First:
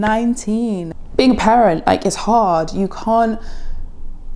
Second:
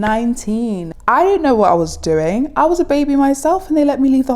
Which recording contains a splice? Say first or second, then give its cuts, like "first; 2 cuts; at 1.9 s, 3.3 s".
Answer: first; 1 cut; at 0.9 s